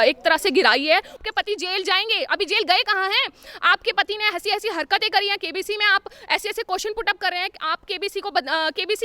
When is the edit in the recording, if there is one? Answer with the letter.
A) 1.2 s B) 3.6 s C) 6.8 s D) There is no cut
A